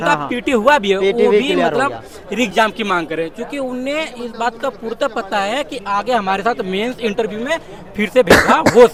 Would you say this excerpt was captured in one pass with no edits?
yes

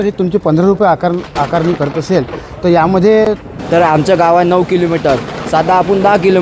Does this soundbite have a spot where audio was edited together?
yes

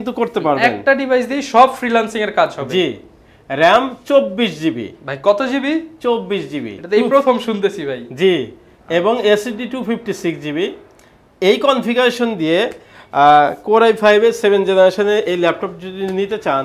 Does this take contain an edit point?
no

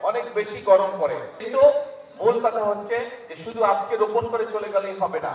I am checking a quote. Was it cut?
yes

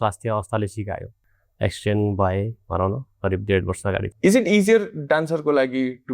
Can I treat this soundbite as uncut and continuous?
no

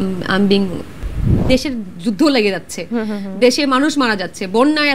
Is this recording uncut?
no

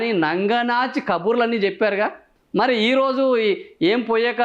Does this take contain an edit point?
no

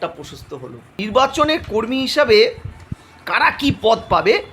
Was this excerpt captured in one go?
no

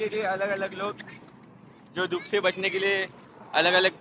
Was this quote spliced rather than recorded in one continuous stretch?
no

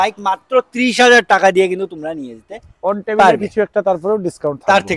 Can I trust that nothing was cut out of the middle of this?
yes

